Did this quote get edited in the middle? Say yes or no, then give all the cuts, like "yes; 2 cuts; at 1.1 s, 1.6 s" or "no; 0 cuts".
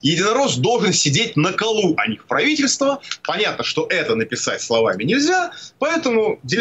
no; 0 cuts